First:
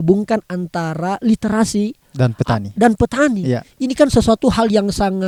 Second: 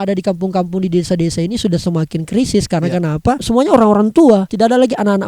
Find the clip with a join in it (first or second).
second